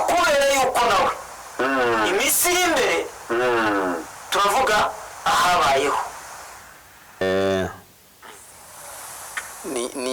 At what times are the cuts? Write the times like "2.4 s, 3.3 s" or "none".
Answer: 7.2 s